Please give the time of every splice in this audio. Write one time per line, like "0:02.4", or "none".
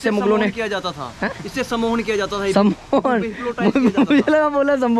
none